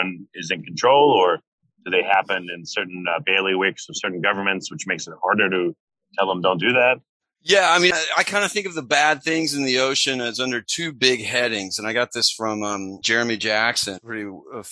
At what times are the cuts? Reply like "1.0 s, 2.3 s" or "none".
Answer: 7.9 s